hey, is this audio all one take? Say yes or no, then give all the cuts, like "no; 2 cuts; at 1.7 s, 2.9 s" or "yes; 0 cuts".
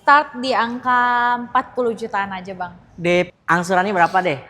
no; 1 cut; at 3.3 s